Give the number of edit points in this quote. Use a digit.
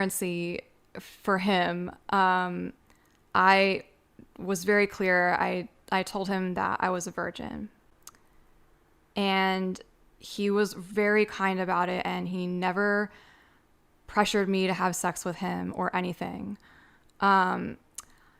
0